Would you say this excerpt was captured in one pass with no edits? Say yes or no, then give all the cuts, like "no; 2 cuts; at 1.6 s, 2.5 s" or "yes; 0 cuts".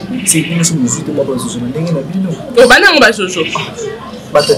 yes; 0 cuts